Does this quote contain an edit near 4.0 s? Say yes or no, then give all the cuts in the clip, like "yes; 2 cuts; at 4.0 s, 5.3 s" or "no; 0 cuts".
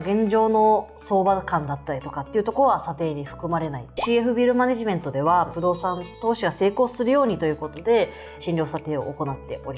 yes; 2 cuts; at 4.0 s, 5.5 s